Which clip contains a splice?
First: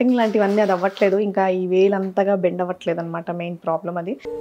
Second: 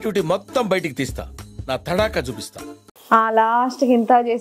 second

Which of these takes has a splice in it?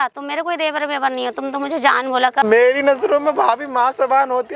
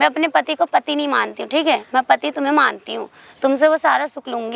first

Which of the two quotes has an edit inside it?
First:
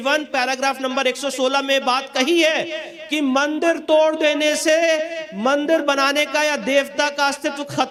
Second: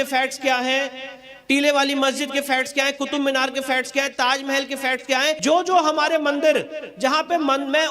second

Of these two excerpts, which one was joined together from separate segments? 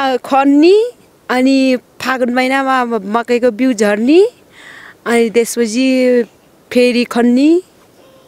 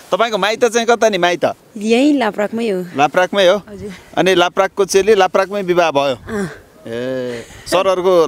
second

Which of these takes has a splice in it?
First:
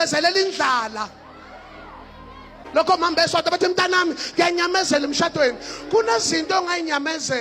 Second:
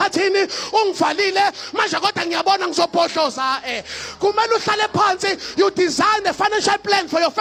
first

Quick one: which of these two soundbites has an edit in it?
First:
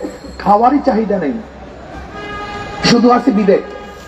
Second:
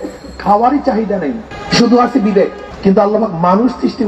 second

